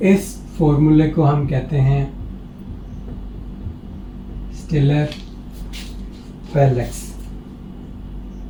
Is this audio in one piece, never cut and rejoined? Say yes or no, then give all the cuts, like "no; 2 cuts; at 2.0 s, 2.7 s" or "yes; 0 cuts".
yes; 0 cuts